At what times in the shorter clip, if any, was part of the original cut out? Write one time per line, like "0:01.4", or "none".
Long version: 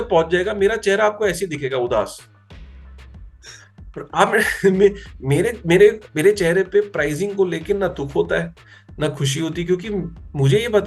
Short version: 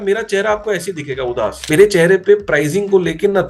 0:01.6